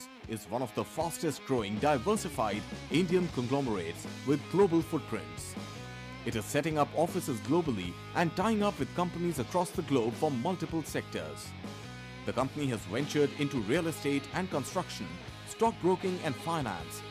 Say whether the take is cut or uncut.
uncut